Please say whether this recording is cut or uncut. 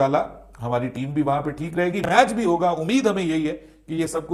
uncut